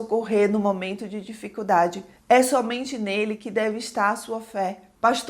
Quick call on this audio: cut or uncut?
cut